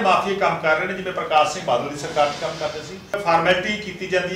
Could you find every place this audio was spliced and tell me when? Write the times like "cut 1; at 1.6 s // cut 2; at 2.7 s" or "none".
cut 1; at 3.2 s